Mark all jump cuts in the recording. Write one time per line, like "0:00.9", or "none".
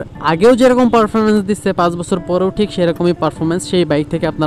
none